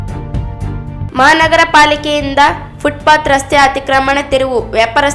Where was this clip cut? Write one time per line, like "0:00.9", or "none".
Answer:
0:00.9